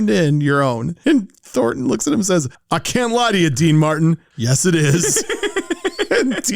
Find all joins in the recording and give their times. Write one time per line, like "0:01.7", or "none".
0:02.6